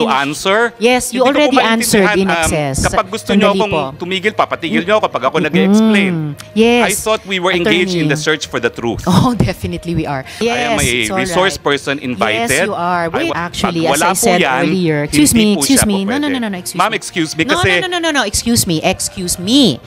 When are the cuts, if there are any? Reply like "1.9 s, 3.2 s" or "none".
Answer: none